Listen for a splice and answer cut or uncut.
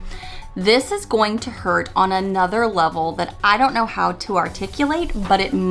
uncut